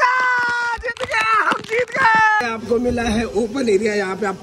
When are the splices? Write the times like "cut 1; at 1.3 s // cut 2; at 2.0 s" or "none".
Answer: cut 1; at 2.4 s